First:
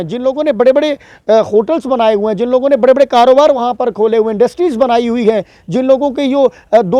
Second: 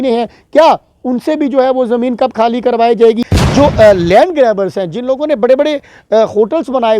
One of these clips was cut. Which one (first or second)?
second